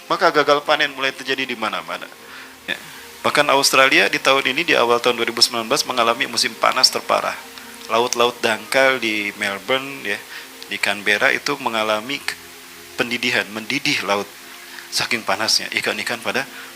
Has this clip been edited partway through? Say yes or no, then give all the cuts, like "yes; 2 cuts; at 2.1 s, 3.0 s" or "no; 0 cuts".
yes; 1 cut; at 2.7 s